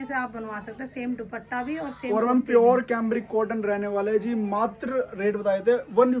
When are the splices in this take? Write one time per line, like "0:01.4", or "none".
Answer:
none